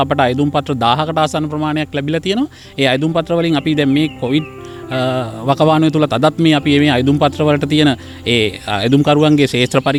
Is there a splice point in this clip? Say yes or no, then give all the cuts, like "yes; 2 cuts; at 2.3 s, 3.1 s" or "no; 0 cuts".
no; 0 cuts